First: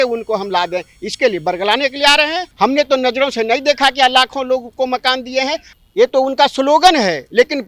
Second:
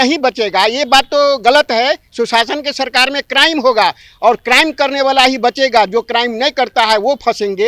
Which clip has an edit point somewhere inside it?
first; 2 cuts; at 2.4 s, 5.7 s

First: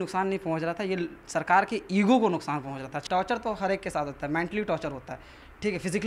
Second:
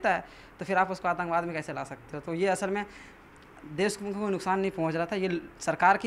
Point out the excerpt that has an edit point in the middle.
first; 1 cut; at 2.9 s

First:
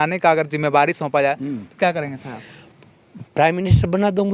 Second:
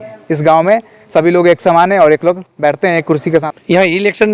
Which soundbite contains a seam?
second; 1 cut; at 3.4 s

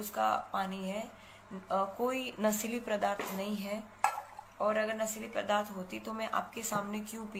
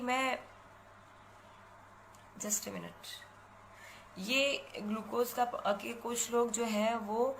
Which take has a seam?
second; 1 cut; at 1.2 s

